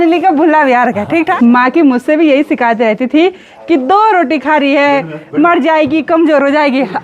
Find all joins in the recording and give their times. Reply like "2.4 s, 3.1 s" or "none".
1.3 s

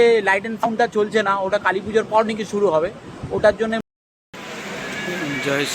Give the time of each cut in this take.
3.8 s

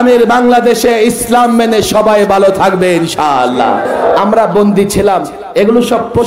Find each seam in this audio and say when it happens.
4.2 s

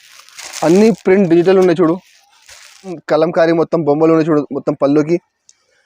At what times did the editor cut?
3.0 s

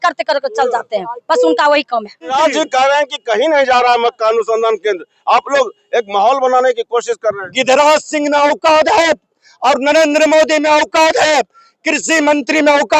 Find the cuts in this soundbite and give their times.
2.3 s

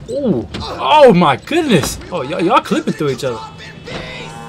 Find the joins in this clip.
none

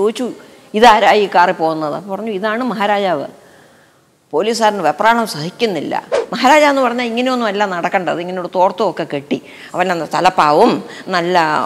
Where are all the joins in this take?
6.2 s

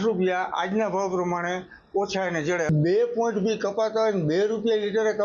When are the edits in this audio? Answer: 2.7 s

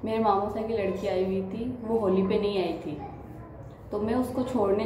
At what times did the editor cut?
none

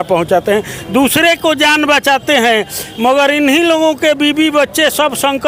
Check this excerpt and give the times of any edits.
none

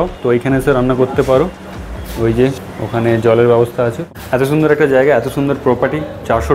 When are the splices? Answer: 4.1 s

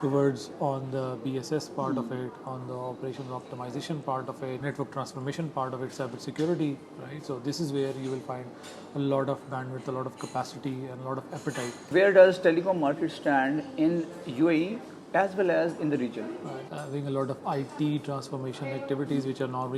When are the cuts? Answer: 4.6 s, 11.8 s, 16.7 s

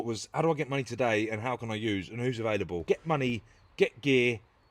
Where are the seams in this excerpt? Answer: 2.8 s

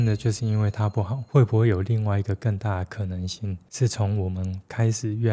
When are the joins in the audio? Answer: 1.2 s

